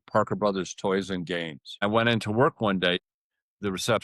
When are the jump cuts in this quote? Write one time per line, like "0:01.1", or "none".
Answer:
0:01.8
0:03.0

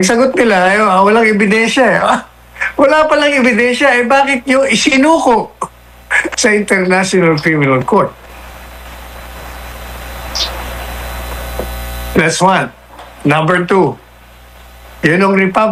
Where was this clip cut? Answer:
none

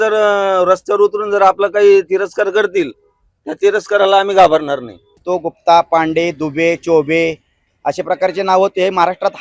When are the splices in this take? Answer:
0:05.2

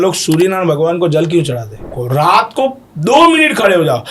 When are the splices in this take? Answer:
0:01.9

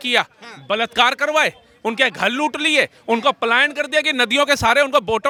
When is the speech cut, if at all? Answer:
none

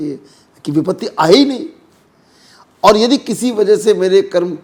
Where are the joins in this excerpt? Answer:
none

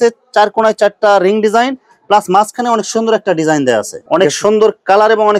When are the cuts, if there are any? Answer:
0:04.0

